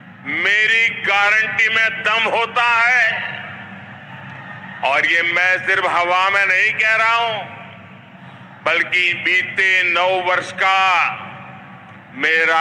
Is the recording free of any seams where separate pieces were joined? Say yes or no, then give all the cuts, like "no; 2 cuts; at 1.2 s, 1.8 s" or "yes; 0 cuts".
yes; 0 cuts